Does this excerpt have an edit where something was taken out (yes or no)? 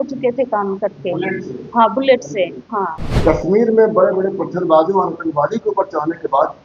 yes